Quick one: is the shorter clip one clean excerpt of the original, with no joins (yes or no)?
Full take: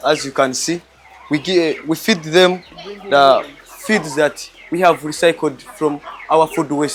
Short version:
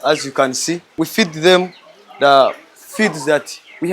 no